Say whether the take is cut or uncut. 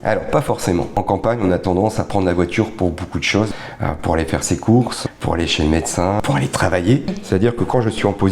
cut